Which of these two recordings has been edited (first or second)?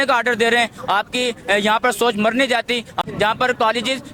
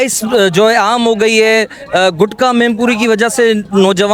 first